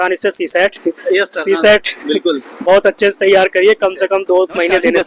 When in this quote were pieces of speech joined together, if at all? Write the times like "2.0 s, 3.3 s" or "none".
none